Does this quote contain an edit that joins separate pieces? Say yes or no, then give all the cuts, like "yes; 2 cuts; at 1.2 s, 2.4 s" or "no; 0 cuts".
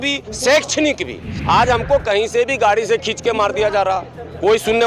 yes; 1 cut; at 1.3 s